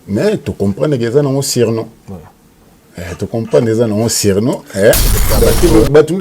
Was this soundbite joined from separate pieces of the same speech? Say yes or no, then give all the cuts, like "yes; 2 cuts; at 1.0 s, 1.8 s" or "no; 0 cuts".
yes; 1 cut; at 5.2 s